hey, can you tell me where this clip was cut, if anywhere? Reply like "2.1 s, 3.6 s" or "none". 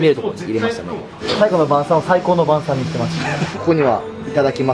1.2 s, 3.5 s

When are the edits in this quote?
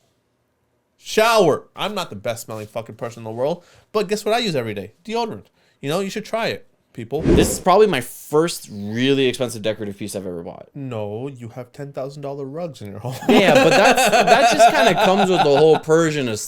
1.7 s, 7.3 s, 10.7 s

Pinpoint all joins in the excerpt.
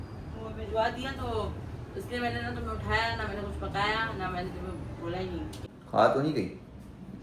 5.6 s

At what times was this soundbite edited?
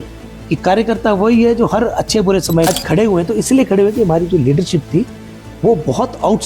2.7 s

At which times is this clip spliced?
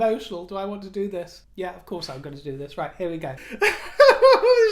1.4 s, 3.4 s

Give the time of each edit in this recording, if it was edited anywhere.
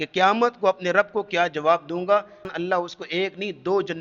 2.5 s

